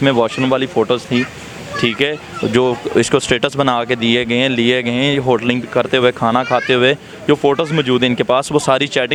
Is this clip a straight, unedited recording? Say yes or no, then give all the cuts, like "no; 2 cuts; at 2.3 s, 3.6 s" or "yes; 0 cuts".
yes; 0 cuts